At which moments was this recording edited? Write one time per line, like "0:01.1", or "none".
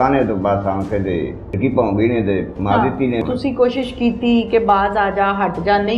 0:01.6
0:03.2